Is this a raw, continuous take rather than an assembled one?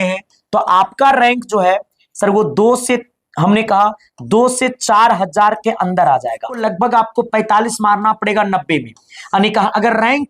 no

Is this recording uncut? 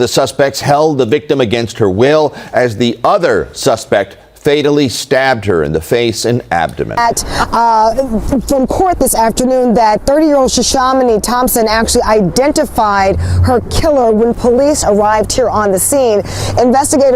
no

